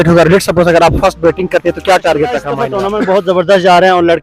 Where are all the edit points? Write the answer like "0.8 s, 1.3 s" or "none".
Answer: 2.5 s